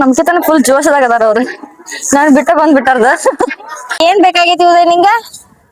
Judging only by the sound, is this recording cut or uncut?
cut